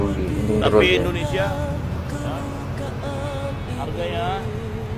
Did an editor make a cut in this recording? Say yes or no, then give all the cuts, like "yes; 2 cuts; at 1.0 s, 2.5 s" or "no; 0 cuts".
no; 0 cuts